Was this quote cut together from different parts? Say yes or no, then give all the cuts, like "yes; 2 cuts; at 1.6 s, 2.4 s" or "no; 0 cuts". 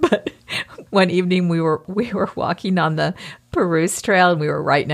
yes; 1 cut; at 1.9 s